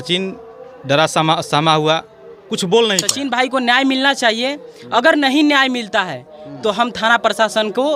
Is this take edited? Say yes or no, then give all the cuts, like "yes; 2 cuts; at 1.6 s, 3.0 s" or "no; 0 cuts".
yes; 1 cut; at 3.1 s